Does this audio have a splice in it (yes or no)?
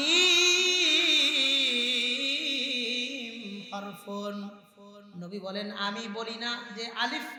no